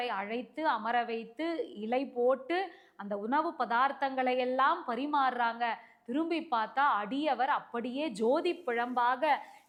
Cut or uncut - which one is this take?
uncut